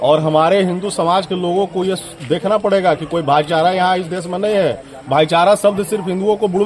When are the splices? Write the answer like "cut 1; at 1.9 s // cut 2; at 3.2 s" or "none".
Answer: none